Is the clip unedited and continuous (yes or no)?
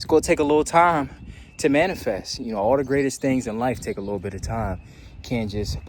yes